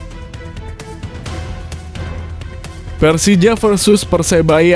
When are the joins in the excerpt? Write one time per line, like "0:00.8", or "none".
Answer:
0:03.0